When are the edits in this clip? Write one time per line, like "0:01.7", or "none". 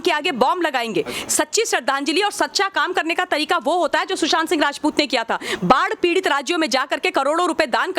0:01.2